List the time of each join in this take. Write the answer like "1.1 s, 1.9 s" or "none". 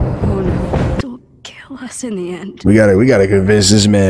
1.0 s

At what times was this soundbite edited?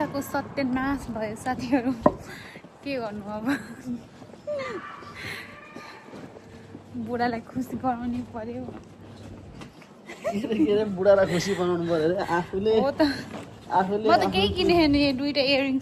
none

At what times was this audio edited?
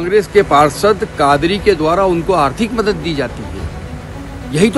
none

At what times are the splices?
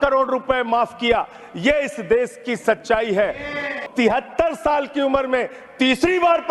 3.7 s

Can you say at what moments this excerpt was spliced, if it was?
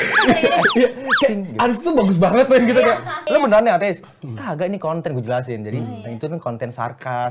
3.3 s

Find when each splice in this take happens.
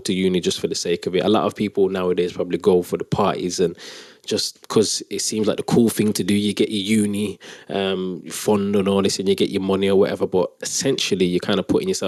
none

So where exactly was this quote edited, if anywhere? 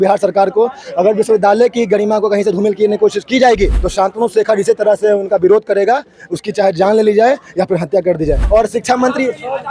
3.8 s, 8.4 s

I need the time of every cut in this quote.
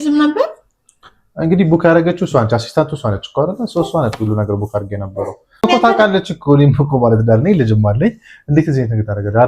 5.6 s

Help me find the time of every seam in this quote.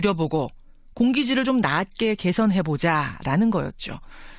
none

